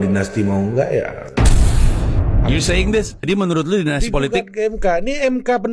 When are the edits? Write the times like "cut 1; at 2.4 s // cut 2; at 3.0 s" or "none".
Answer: none

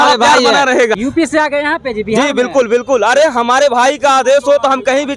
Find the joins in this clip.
cut 1; at 1.0 s

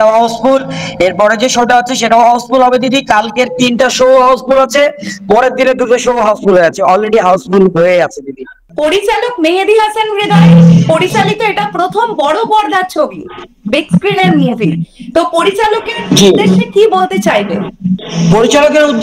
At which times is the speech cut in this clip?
cut 1; at 8.7 s

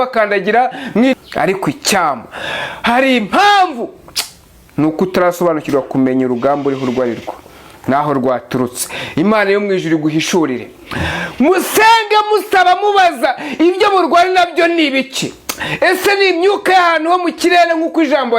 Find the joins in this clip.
cut 1; at 1.1 s

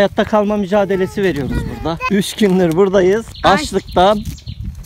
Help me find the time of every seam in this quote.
cut 1; at 2.0 s // cut 2; at 3.3 s

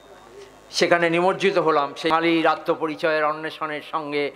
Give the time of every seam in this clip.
cut 1; at 2.1 s

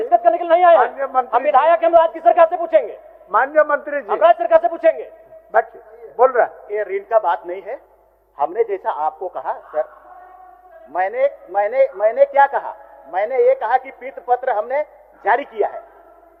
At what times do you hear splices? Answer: none

